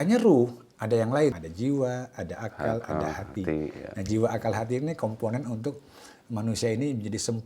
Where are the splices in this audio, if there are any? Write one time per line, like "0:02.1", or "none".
0:01.3